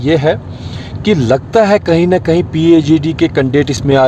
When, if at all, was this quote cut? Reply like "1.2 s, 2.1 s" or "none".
none